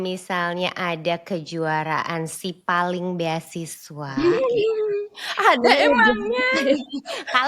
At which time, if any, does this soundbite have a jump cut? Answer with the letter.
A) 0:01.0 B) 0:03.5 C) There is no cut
C